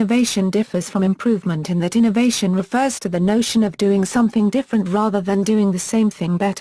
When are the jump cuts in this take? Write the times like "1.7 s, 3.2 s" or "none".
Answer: 1.0 s